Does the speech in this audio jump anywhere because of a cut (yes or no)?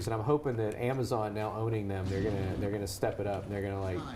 no